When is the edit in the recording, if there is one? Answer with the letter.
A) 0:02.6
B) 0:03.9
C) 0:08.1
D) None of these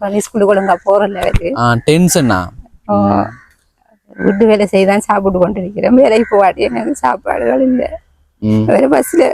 D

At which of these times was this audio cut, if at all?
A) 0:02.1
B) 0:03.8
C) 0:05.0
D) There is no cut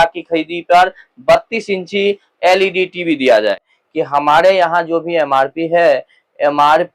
B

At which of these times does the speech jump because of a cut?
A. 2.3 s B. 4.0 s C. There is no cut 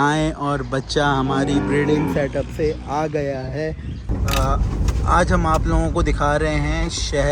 B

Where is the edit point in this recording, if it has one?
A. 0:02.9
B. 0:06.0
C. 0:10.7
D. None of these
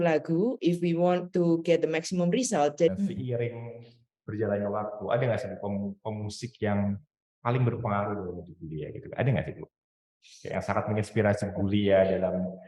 A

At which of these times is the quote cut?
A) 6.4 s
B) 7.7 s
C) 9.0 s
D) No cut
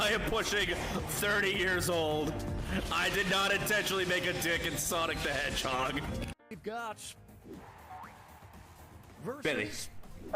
A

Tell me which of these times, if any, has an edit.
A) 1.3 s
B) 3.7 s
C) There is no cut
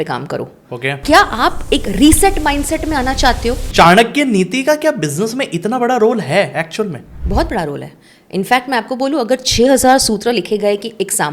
B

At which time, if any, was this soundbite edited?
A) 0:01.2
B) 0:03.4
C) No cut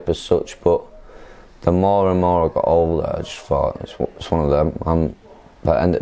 C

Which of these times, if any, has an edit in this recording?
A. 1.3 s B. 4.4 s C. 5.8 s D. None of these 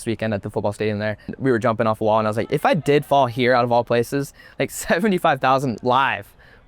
A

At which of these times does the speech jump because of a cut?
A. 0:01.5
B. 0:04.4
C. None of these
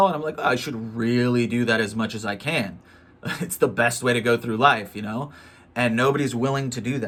C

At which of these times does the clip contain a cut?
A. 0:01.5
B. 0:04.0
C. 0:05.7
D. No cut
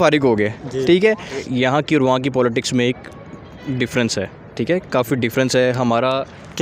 A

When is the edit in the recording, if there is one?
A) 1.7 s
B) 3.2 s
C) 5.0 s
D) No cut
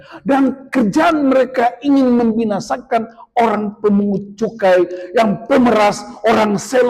D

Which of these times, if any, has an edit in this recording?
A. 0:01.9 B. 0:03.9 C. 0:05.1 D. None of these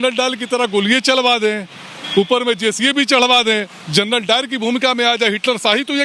D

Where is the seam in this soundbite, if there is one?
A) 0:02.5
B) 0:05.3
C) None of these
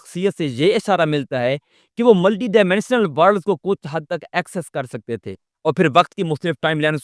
C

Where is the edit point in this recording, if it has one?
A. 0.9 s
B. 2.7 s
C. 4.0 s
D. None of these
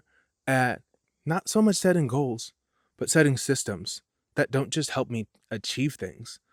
D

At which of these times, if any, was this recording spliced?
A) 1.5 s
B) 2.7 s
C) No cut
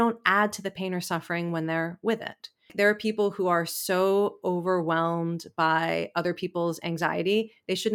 B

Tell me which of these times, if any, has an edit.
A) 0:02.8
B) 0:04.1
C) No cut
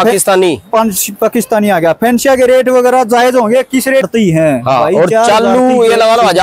B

